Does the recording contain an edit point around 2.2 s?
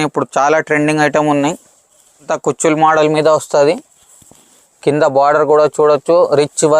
yes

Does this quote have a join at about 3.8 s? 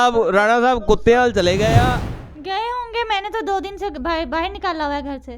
no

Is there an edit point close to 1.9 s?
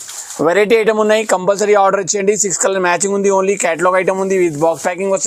no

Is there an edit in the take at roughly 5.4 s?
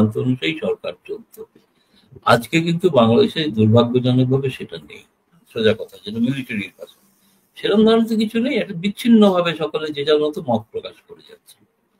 yes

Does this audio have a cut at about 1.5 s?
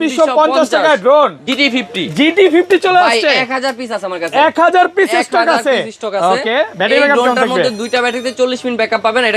yes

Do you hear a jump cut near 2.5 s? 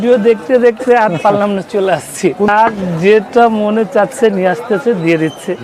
yes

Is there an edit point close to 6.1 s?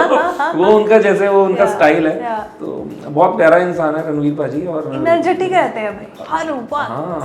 yes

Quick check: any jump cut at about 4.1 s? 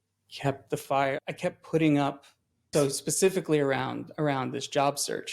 no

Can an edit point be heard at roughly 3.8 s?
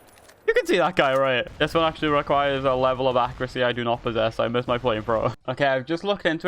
no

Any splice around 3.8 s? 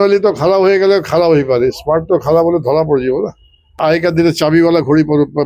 yes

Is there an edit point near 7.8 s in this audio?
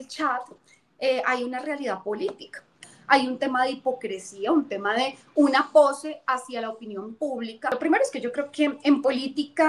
yes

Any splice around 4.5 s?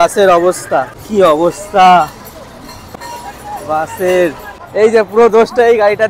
yes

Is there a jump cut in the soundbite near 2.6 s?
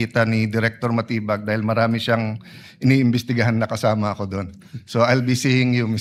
no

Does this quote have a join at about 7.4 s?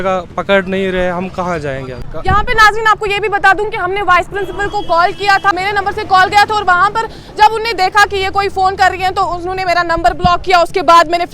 no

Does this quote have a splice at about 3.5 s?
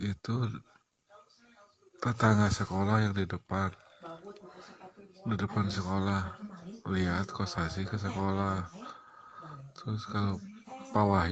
no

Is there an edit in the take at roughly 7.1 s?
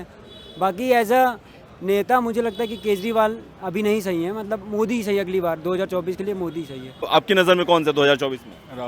yes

